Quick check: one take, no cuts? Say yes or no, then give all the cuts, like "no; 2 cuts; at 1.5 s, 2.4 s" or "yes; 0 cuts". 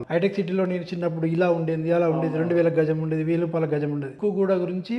no; 1 cut; at 4.1 s